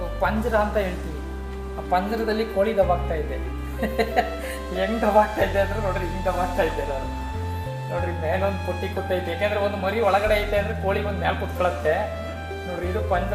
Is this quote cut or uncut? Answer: uncut